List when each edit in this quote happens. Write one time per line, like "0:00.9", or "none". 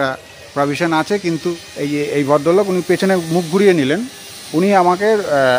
0:01.7